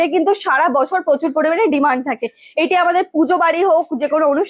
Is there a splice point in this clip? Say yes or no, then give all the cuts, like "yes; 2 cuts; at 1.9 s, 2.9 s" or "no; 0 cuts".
no; 0 cuts